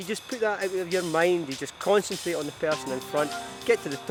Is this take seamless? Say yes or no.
yes